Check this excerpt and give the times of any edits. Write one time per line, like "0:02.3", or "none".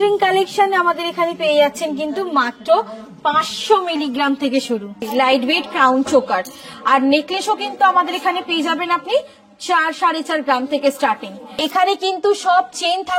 0:05.0
0:11.6